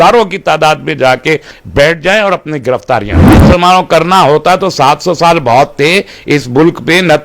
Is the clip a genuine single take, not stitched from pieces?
no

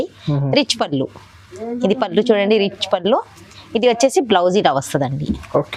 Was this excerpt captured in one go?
yes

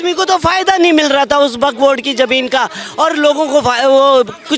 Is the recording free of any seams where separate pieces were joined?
yes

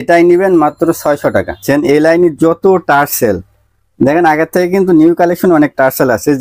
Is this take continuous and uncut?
no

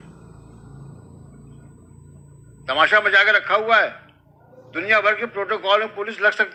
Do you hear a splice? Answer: no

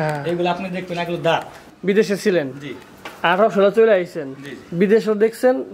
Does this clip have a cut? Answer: yes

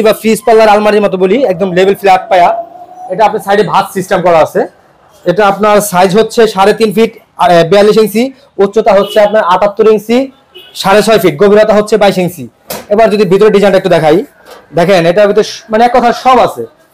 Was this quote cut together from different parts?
no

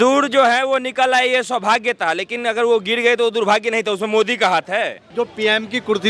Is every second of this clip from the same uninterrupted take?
no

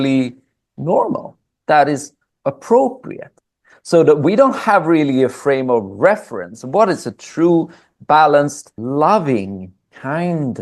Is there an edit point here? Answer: yes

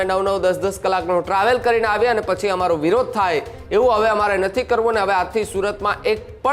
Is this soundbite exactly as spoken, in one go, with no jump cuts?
yes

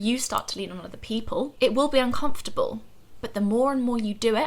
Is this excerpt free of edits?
no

